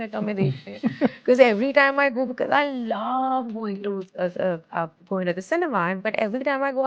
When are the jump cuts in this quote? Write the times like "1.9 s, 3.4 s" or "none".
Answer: none